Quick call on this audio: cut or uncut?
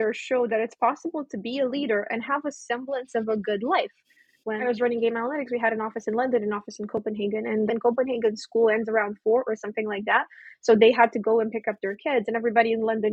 cut